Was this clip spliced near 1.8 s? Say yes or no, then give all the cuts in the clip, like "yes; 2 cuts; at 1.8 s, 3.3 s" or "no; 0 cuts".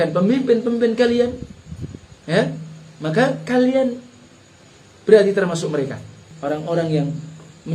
no; 1 cut; at 6.3 s